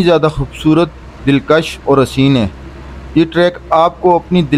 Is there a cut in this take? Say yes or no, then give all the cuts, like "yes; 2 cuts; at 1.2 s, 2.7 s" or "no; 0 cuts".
no; 0 cuts